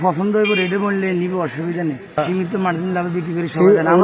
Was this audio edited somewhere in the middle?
yes; 1 cut; at 2.2 s

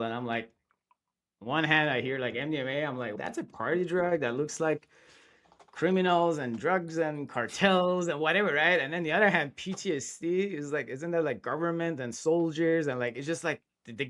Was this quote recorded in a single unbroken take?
yes; 0 cuts

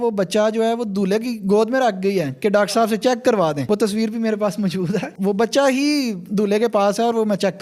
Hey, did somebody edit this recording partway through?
no; 0 cuts

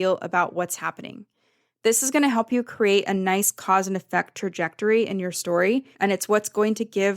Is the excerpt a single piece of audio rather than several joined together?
no; 1 cut; at 5.9 s

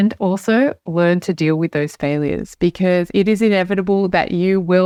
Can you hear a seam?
no; 0 cuts

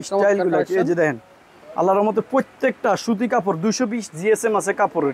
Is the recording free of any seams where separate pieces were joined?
yes; 0 cuts

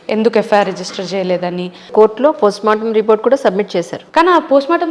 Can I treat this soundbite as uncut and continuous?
no; 2 cuts; at 1.9 s, 4.0 s

